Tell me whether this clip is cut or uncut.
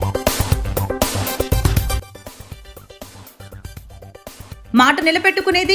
uncut